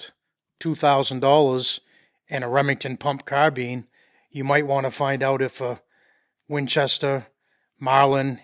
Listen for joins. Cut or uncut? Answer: uncut